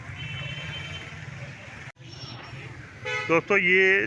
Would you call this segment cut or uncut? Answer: cut